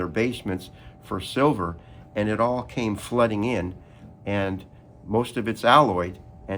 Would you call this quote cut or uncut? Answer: uncut